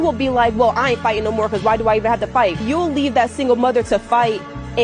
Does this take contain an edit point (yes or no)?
yes